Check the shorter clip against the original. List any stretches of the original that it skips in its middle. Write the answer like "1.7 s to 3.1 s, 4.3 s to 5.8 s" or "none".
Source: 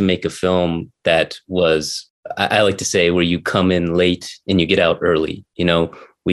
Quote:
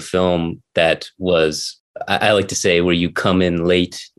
none